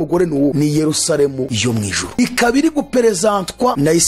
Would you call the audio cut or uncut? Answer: uncut